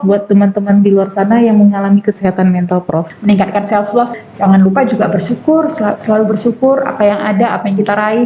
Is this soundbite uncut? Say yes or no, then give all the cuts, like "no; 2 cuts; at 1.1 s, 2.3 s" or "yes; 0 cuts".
no; 2 cuts; at 3.1 s, 4.1 s